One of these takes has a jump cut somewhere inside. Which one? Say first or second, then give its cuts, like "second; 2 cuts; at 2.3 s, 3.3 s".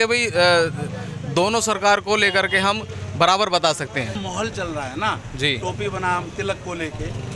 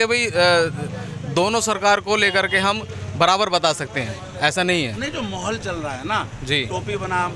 first; 1 cut; at 4.2 s